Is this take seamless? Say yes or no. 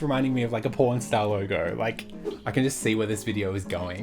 no